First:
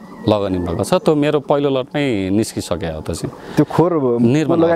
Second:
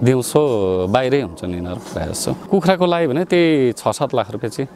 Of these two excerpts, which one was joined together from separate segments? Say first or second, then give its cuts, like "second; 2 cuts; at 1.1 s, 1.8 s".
second; 1 cut; at 2.3 s